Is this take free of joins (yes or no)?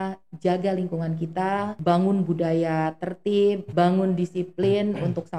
no